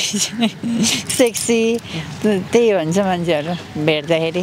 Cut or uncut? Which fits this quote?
uncut